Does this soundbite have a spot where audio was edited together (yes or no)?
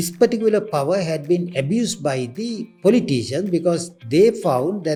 no